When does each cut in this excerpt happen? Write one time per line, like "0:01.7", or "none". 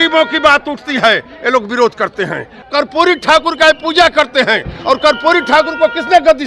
0:02.6